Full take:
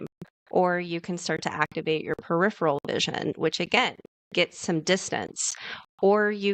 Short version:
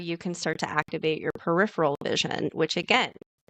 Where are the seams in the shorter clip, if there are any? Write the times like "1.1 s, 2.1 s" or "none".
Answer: none

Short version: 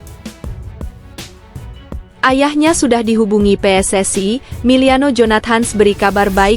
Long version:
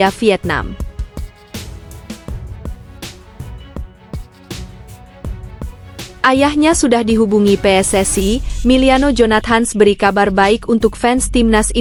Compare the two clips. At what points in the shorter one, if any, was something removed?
2.1 s

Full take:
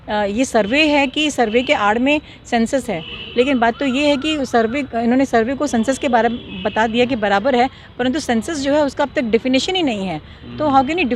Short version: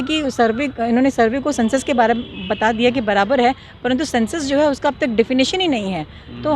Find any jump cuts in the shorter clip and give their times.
none

